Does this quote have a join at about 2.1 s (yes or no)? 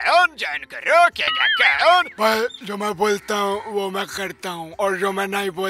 yes